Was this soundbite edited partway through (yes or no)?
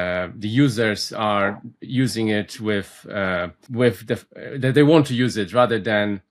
yes